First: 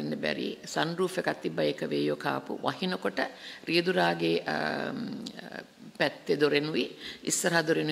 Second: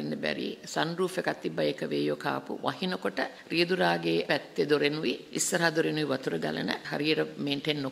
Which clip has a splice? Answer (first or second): second